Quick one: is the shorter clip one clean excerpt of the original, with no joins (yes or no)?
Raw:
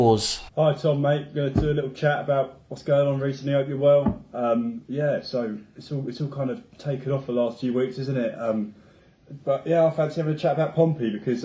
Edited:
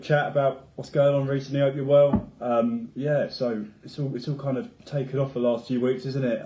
yes